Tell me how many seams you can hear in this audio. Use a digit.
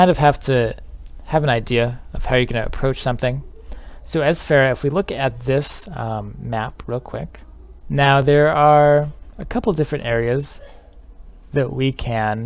1